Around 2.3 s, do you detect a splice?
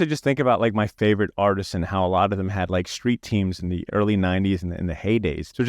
no; 2 cuts; at 0.9 s, 3.9 s

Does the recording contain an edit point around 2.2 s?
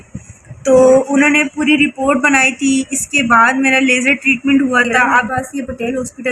no; 1 cut; at 5.3 s

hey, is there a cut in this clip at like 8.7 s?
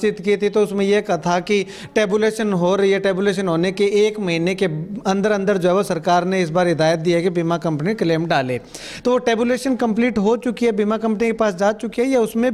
no; 0 cuts

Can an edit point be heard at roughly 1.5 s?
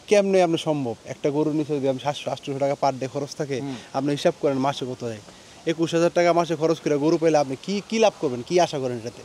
no; 0 cuts

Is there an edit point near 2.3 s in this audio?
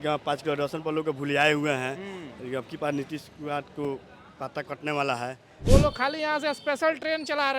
no; 1 cut; at 5.5 s

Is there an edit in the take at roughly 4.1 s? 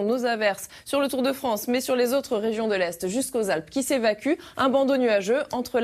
no; 1 cut; at 1.3 s

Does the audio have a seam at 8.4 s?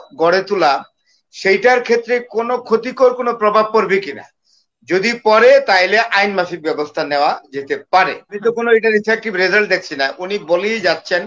yes; 1 cut; at 8.4 s

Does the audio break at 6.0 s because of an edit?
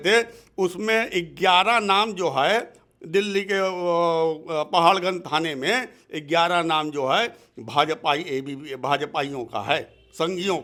no; 0 cuts

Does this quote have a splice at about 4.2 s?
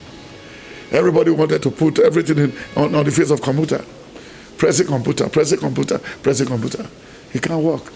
no; 0 cuts

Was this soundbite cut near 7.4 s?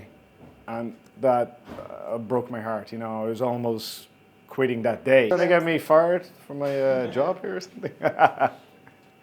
no; 1 cut; at 5.3 s

